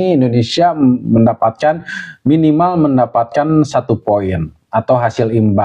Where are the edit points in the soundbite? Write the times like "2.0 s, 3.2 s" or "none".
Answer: none